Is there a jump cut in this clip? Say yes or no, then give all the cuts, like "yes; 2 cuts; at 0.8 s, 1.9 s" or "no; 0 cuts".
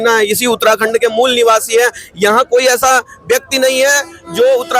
no; 0 cuts